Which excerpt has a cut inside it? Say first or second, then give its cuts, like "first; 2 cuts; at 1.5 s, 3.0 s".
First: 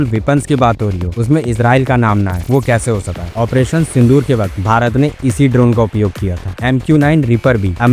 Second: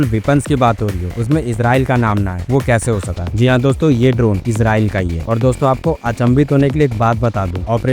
first; 2 cuts; at 3.2 s, 6.5 s